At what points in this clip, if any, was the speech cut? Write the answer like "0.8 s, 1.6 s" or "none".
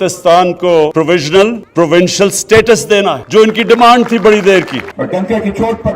0.9 s, 1.6 s, 3.2 s, 4.8 s

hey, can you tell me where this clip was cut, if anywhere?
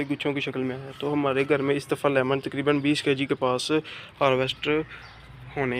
none

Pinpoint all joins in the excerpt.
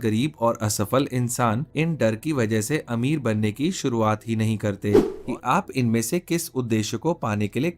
1.7 s, 5.1 s

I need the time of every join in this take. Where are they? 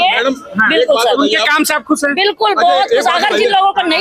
none

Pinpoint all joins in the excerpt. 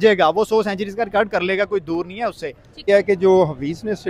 2.9 s

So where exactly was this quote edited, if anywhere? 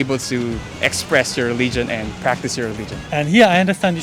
3.1 s

